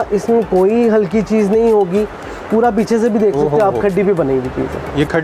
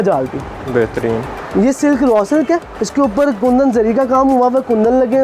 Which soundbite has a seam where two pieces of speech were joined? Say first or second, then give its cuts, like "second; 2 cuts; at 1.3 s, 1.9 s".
second; 2 cuts; at 1.4 s, 2.8 s